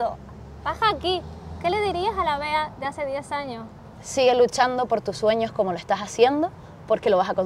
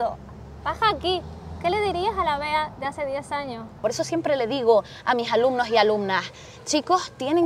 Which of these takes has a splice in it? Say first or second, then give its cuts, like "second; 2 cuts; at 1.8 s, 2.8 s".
second; 1 cut; at 3.8 s